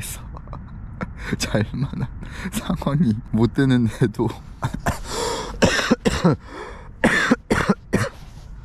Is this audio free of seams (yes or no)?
no